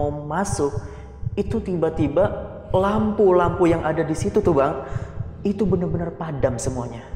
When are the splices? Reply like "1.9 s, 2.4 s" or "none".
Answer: none